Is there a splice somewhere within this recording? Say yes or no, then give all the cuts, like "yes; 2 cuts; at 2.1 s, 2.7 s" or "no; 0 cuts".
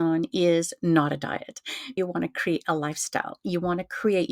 yes; 1 cut; at 1.9 s